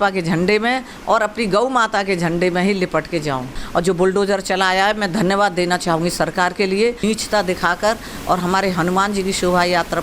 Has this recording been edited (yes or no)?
yes